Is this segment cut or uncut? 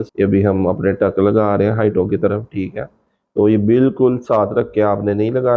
uncut